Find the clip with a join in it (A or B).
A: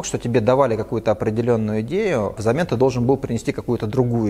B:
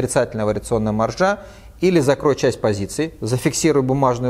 A